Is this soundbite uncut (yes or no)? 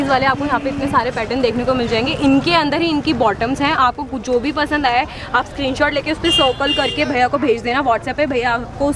yes